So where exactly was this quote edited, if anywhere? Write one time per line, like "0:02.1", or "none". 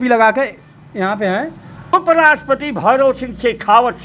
0:01.9